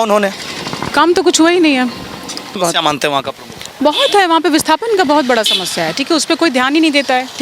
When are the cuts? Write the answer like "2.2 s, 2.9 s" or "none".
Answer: 2.6 s